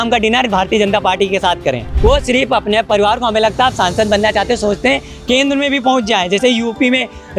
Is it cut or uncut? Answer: cut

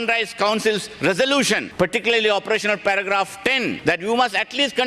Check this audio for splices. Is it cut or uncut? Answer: cut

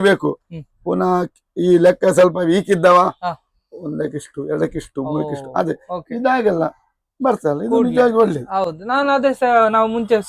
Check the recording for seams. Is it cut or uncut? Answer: uncut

